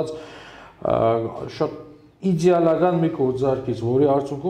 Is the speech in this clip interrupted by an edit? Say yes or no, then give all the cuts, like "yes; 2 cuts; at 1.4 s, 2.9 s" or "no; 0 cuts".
no; 0 cuts